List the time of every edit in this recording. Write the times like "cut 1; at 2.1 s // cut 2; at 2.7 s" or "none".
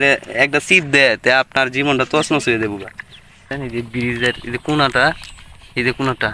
cut 1; at 3.5 s